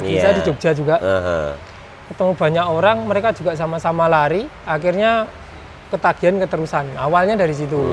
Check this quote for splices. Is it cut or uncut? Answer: uncut